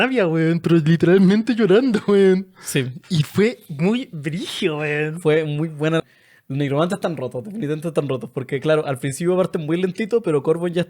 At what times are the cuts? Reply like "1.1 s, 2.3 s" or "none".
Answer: 6.0 s